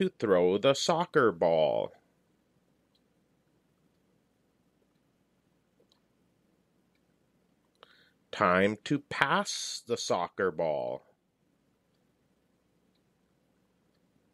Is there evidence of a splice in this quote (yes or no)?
no